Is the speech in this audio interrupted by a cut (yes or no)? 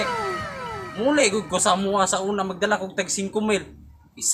no